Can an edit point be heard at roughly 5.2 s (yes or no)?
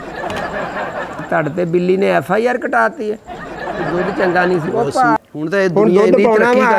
yes